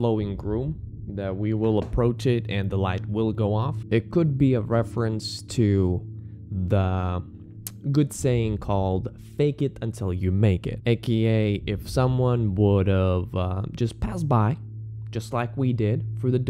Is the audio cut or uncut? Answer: cut